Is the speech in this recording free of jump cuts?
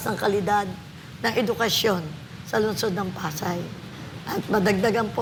yes; 0 cuts

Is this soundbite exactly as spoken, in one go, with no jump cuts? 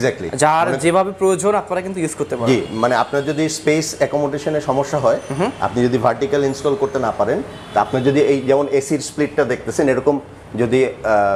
yes; 0 cuts

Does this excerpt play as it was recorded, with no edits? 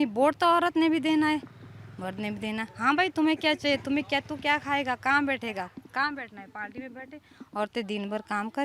yes; 0 cuts

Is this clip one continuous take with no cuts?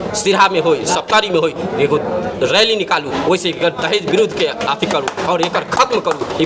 yes; 0 cuts

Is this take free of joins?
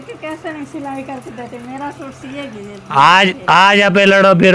yes; 0 cuts

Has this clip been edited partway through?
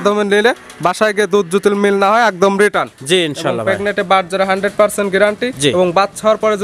no; 0 cuts

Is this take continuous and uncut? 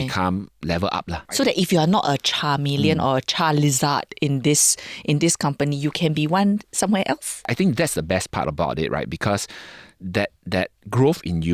no; 2 cuts; at 1.3 s, 7.5 s

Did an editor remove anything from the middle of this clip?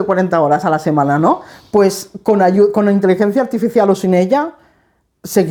no; 0 cuts

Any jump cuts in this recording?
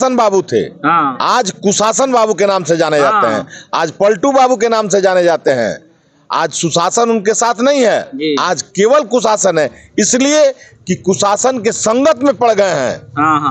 no; 0 cuts

